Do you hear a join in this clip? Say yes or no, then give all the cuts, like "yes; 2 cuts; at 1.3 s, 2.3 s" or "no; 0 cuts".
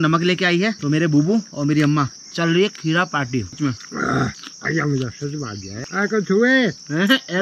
yes; 1 cut; at 5.7 s